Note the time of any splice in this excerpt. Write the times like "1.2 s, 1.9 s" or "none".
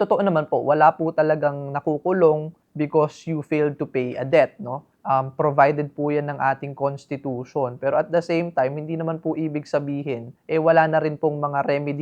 none

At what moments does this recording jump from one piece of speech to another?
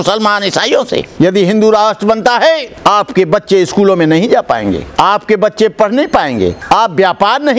1.1 s, 2.7 s, 4.9 s, 6.6 s

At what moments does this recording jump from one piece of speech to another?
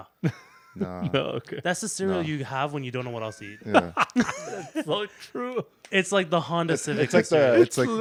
none

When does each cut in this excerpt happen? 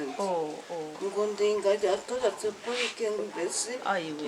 3.2 s

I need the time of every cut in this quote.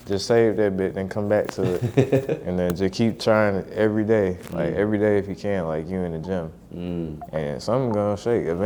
none

